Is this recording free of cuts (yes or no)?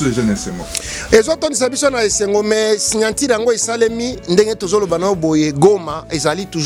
yes